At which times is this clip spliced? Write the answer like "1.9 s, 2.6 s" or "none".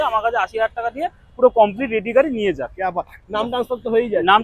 none